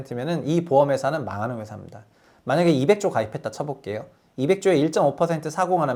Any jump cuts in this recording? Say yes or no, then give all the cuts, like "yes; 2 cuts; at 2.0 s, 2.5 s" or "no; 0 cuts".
no; 0 cuts